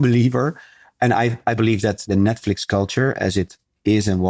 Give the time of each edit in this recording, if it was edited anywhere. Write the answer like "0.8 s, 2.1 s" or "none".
2.0 s